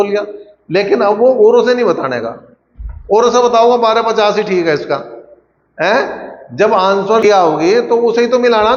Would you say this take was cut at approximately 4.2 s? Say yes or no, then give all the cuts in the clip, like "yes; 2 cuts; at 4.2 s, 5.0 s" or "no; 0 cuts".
no; 1 cut; at 7.2 s